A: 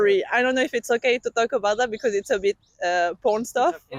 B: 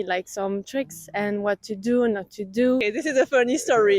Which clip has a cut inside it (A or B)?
B